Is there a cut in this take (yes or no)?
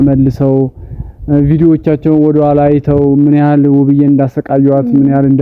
no